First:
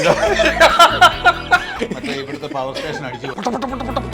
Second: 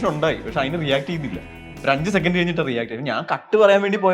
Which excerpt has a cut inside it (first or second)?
first